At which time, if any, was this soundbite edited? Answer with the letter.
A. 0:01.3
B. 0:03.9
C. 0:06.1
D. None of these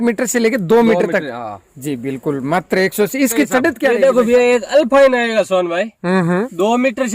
B